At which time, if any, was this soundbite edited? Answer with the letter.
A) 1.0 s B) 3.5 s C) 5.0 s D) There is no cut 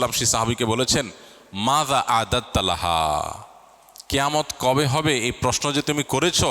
D